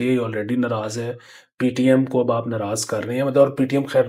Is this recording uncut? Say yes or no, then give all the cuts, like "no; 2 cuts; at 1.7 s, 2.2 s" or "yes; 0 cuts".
yes; 0 cuts